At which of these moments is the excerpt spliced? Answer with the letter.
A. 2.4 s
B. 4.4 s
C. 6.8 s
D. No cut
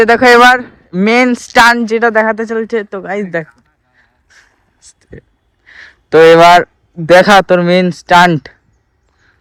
D